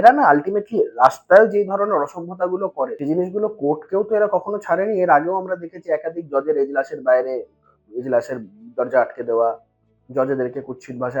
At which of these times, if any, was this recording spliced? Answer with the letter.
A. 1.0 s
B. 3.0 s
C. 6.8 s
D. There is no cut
B